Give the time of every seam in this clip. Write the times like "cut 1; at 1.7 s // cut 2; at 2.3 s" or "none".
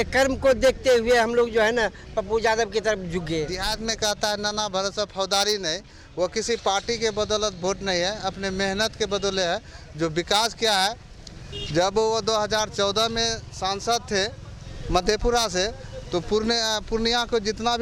cut 1; at 3.6 s